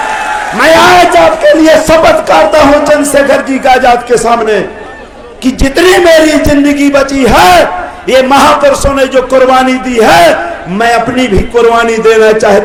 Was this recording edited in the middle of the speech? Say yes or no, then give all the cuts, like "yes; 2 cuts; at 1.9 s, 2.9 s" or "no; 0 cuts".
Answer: no; 0 cuts